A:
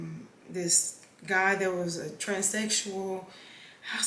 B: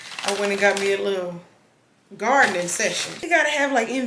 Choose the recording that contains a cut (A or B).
B